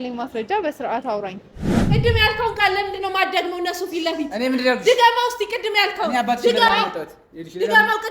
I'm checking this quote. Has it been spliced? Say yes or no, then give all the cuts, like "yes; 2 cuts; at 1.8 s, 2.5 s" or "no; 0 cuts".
yes; 1 cut; at 1.8 s